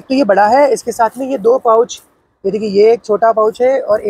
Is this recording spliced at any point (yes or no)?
no